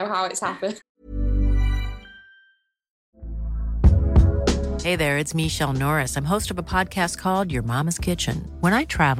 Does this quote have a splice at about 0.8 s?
yes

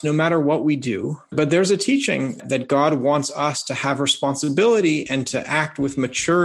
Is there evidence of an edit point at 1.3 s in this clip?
yes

